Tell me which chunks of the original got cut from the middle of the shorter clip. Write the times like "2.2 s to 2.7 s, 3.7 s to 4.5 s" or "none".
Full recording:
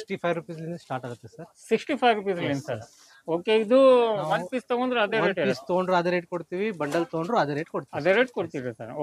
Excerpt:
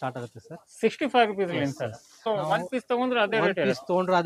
3.2 s to 4.1 s